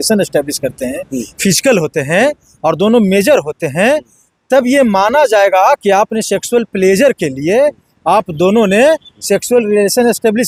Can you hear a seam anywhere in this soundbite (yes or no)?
no